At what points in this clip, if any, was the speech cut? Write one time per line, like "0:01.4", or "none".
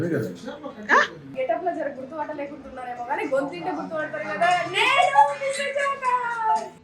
0:01.3